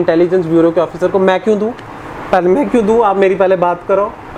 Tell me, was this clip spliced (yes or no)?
no